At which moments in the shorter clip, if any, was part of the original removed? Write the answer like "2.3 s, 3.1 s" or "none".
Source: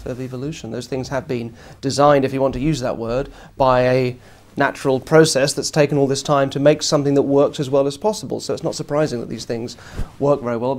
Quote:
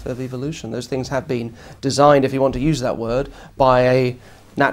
none